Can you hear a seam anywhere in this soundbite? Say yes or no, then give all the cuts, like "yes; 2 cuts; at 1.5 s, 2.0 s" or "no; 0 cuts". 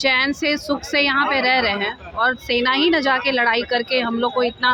no; 0 cuts